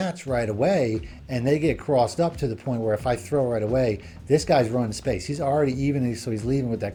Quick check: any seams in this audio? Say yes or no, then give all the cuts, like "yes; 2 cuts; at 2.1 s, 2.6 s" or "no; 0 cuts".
no; 0 cuts